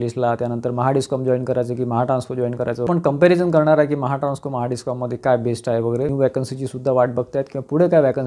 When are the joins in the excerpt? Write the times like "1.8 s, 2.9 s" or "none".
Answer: 2.9 s, 6.1 s

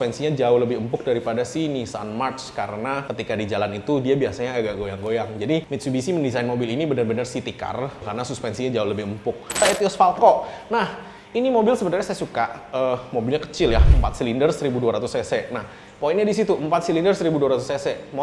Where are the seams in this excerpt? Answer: 5.7 s, 8.1 s, 9.6 s

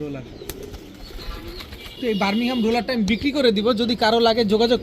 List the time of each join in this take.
2.0 s

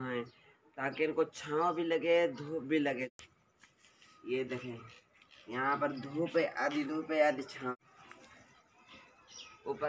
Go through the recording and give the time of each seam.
3.1 s, 7.7 s

